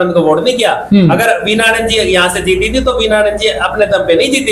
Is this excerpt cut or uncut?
uncut